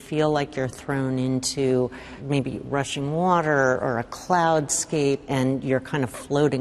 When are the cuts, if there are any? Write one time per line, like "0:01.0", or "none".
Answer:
none